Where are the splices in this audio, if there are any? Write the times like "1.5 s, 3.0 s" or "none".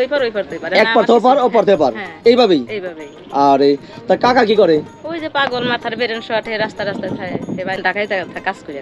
7.8 s